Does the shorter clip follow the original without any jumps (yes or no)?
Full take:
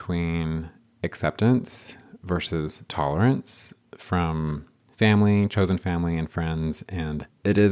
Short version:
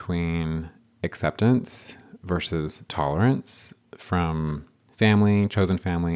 yes